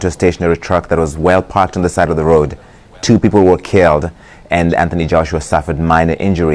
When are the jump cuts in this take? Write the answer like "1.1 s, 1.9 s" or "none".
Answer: 3.2 s